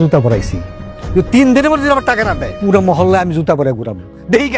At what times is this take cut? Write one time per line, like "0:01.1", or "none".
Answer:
0:02.5